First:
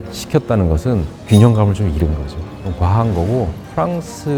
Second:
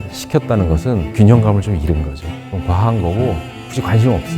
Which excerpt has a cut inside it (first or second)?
second